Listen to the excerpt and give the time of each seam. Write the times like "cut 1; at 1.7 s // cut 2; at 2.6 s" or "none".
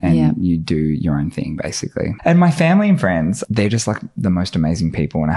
cut 1; at 2.2 s // cut 2; at 3.4 s